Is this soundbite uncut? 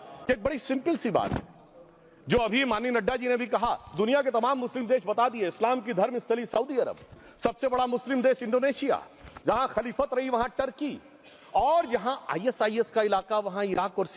yes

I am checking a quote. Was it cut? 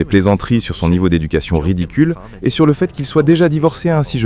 yes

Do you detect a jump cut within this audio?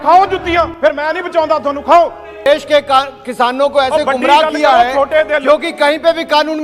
yes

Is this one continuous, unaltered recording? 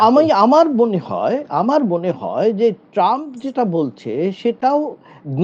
yes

